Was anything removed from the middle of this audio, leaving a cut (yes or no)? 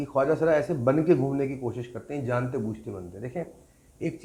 no